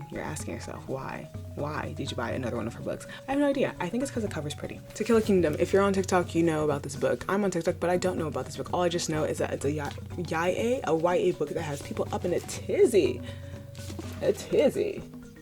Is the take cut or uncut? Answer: cut